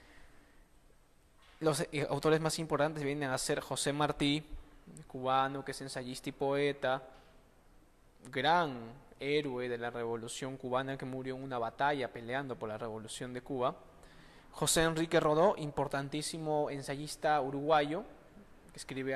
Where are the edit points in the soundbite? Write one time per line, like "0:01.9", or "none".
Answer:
0:06.3

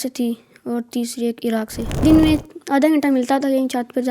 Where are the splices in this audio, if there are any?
0:02.0

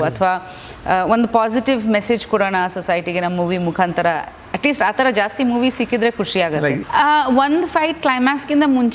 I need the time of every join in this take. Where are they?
0:06.8

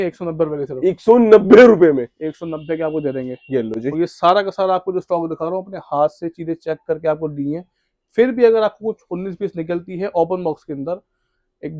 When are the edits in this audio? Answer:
none

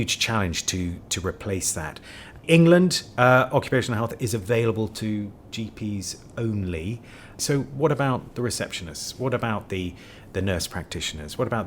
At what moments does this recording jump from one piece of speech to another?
0:02.4
0:07.4

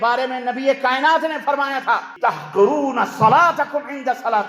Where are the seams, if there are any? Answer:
0:02.1

